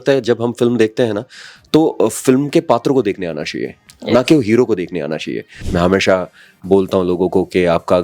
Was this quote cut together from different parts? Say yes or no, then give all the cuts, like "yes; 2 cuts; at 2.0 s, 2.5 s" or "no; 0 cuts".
yes; 1 cut; at 5.6 s